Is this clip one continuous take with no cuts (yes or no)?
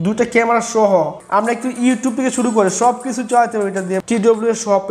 no